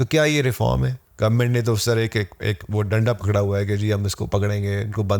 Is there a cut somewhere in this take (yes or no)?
yes